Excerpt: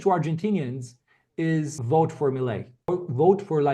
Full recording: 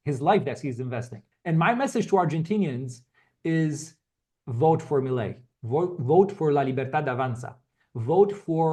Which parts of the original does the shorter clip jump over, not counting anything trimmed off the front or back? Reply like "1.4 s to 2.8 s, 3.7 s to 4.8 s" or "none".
3.8 s to 4.5 s, 5.6 s to 5.8 s